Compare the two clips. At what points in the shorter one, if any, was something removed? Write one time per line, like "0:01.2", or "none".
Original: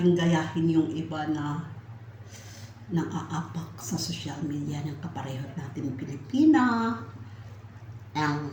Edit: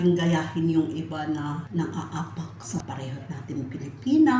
0:01.7
0:02.8